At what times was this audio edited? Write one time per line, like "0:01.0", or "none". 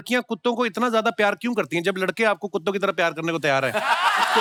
none